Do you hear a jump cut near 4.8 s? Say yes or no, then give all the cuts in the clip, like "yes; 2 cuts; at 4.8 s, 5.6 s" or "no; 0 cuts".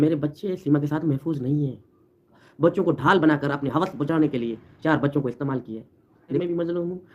no; 2 cuts; at 2.4 s, 6.4 s